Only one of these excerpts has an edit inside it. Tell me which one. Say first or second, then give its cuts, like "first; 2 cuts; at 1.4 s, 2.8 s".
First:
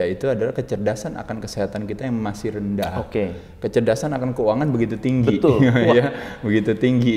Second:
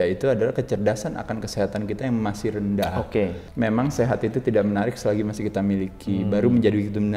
second; 1 cut; at 3.4 s